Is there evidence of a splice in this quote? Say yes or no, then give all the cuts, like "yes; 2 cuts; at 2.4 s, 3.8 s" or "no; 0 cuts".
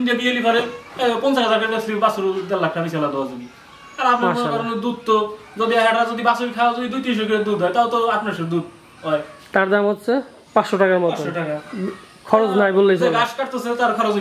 no; 0 cuts